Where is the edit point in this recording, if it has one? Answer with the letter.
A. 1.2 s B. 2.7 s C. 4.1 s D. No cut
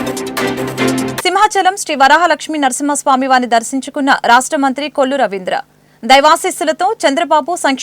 A